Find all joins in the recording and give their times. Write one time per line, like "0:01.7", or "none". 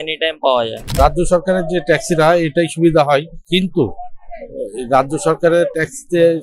0:01.0
0:03.4